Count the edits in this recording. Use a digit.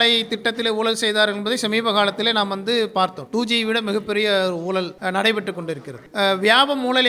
2